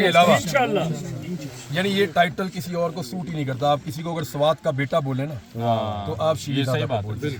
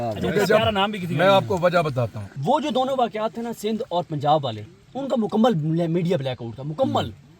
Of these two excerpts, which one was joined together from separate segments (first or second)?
second